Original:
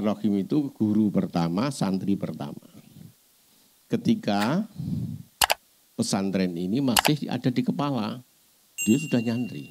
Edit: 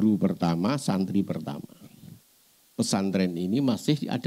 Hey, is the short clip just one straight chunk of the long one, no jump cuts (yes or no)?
no